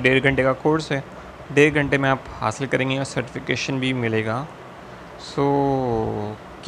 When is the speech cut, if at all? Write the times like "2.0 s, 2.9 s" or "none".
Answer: none